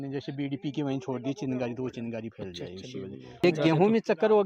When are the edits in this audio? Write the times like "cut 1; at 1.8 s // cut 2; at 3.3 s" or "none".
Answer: cut 1; at 3.4 s